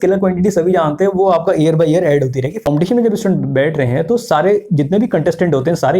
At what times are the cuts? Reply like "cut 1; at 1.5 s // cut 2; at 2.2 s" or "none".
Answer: cut 1; at 2.6 s